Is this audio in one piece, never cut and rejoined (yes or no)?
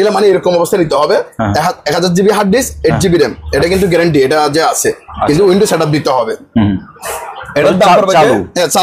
yes